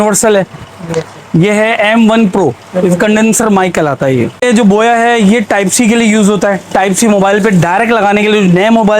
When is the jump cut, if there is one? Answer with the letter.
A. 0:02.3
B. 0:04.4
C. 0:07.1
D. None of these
B